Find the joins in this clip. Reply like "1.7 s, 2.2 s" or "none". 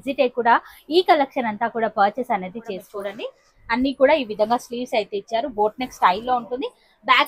2.8 s